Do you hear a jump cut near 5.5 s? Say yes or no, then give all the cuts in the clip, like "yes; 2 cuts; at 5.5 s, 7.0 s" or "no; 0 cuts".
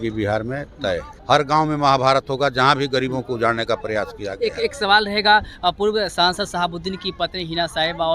no; 1 cut; at 1.1 s